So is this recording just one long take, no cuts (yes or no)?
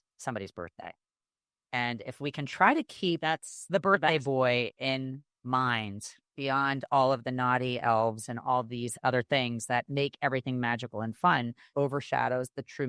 yes